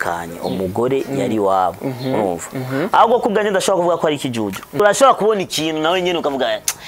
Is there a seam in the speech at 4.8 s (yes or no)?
yes